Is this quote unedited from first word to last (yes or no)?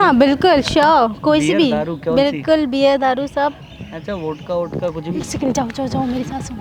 yes